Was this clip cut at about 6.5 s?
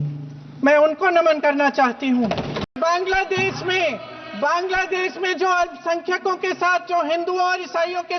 no; 1 cut; at 2.6 s

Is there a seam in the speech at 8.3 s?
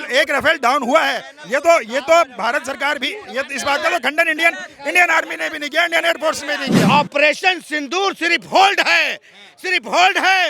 no; 1 cut; at 6.9 s

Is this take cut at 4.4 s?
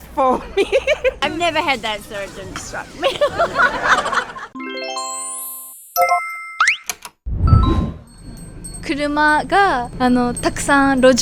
no; 0 cuts

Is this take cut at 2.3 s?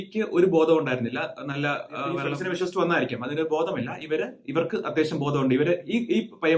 yes; 1 cut; at 2.3 s

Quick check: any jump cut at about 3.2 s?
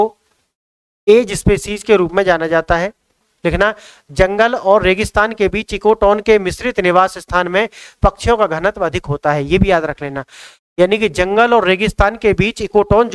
yes; 1 cut; at 3.2 s

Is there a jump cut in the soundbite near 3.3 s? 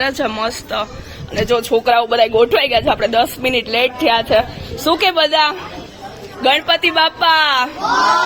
no; 0 cuts

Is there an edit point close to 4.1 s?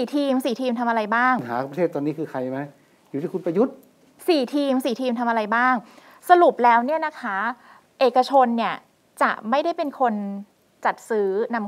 yes; 2 cuts; at 1.6 s, 4.1 s

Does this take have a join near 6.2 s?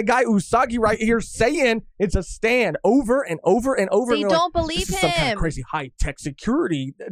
no; 0 cuts

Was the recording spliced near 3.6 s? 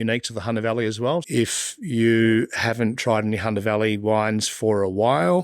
no; 1 cut; at 1.2 s

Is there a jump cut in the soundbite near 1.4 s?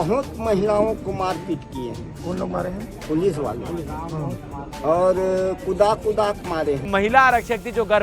no; 1 cut; at 6.9 s

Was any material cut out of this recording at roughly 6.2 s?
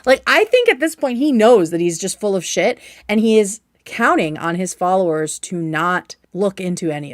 yes; 1 cut; at 6.2 s

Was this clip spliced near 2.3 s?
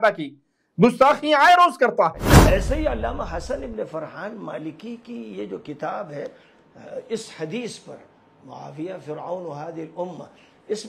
yes; 1 cut; at 2.3 s

